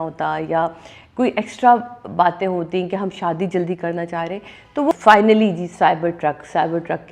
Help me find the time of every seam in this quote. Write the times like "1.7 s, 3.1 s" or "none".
4.9 s